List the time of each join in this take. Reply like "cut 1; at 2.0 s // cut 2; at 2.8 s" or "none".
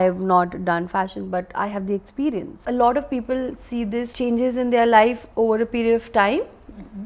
cut 1; at 2.6 s // cut 2; at 4.1 s